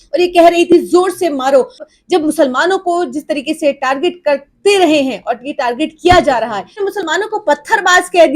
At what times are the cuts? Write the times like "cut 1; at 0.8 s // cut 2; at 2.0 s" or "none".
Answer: cut 1; at 1.8 s // cut 2; at 6.7 s

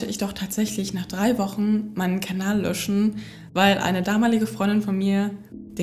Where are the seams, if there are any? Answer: none

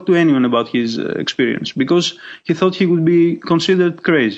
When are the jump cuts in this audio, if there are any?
none

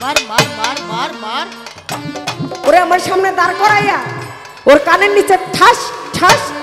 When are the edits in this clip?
none

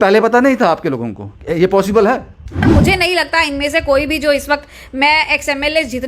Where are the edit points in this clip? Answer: cut 1; at 2.7 s

